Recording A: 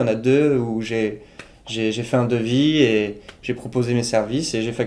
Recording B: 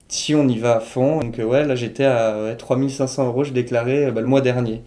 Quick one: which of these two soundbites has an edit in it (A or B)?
B